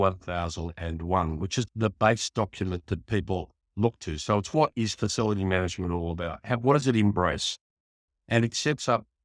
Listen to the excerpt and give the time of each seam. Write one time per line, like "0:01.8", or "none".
0:01.6